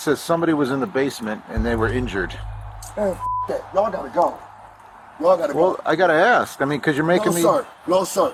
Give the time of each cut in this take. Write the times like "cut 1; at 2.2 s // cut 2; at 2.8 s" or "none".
none